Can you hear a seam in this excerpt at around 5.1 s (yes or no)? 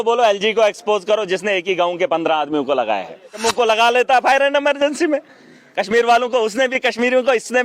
no